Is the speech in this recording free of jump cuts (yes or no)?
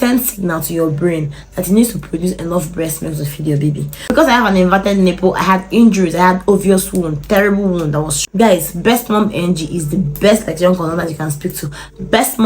no